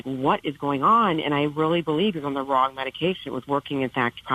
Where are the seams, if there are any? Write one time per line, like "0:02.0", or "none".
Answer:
none

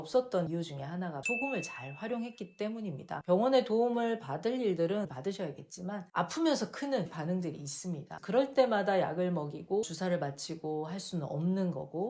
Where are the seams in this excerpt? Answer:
0:03.2
0:06.1
0:09.8

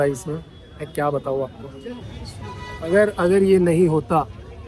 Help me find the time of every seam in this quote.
0:01.9

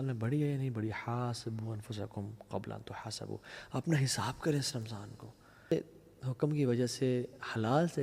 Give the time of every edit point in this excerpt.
0:05.7

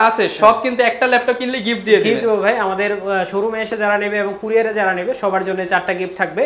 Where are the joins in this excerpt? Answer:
none

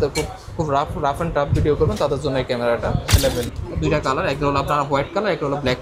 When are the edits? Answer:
0:03.1

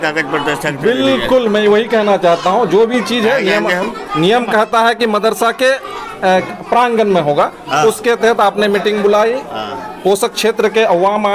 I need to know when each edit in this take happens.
none

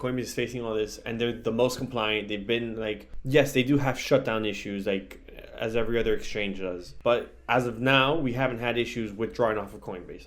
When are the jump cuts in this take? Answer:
0:03.1
0:06.9

